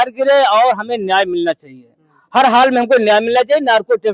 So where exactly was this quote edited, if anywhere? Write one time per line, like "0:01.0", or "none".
none

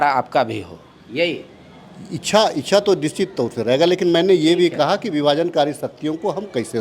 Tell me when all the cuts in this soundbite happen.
none

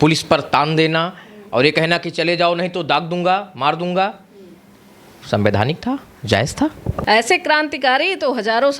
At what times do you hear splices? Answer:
0:06.9

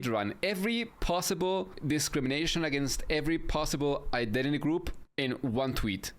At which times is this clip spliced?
0:01.8
0:05.0

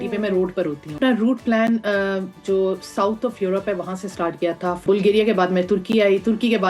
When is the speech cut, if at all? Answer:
0:01.0
0:04.8

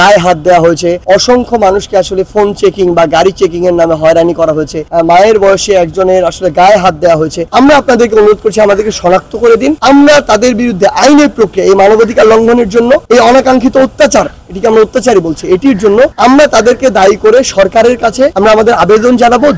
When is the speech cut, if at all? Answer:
0:04.9
0:07.5

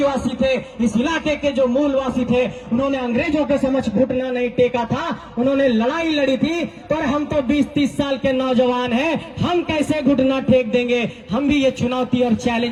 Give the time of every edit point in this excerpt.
none

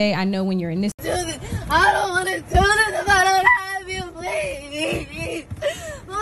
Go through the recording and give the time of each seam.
0:00.9

